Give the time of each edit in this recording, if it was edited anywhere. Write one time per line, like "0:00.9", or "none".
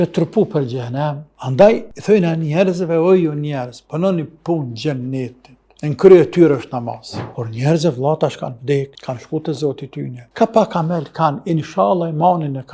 0:01.3
0:07.3